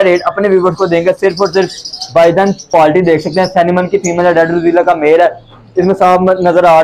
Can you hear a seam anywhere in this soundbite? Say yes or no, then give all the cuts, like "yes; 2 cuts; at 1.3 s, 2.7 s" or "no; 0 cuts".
yes; 1 cut; at 2.7 s